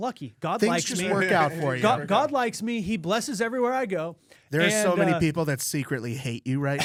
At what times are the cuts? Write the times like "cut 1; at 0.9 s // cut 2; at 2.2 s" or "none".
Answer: none